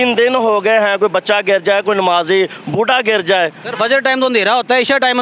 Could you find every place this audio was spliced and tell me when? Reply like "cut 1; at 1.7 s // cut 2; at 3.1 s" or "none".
none

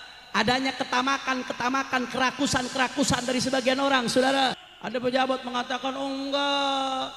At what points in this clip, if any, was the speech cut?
cut 1; at 4.7 s

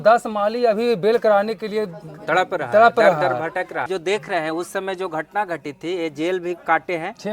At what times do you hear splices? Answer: cut 1; at 3.9 s

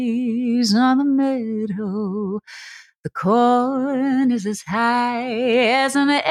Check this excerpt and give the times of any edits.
none

